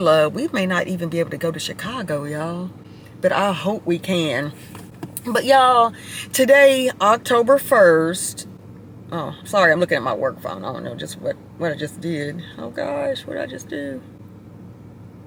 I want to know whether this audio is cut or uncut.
uncut